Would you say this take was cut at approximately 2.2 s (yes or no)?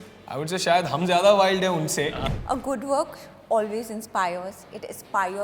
yes